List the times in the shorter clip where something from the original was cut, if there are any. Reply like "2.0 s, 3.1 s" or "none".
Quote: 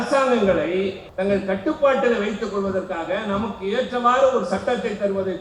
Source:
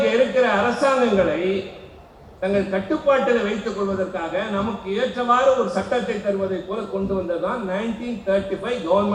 1.0 s